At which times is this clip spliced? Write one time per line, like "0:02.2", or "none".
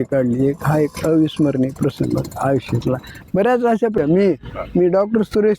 0:04.0